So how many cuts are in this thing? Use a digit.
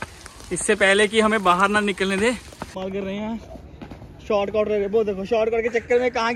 1